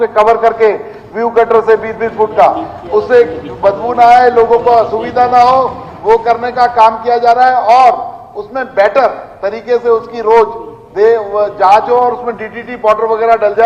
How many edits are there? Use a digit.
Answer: 0